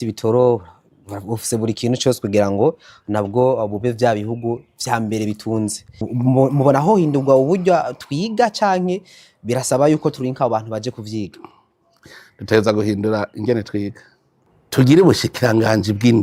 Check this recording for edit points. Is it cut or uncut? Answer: uncut